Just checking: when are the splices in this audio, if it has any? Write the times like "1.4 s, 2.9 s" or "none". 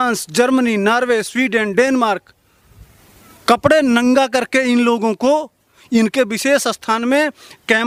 none